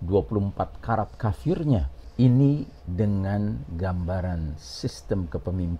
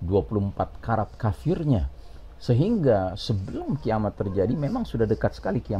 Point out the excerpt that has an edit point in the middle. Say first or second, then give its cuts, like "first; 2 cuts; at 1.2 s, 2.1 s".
first; 1 cut; at 2.0 s